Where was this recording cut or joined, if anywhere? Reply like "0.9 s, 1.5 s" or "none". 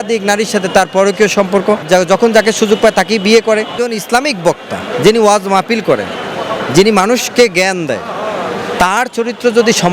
1.8 s, 3.7 s